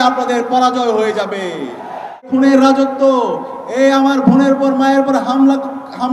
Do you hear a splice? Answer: yes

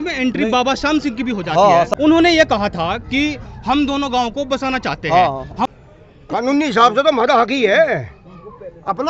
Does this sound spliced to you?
yes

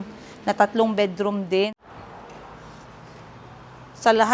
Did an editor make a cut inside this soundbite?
yes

